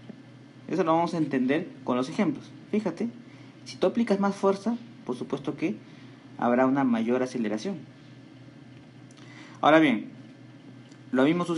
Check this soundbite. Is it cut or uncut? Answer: uncut